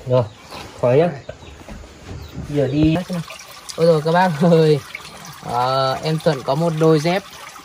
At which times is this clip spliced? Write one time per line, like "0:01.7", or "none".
0:03.0